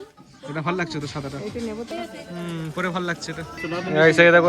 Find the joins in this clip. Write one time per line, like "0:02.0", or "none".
0:01.9
0:03.6